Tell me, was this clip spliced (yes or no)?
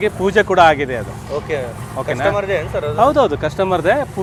no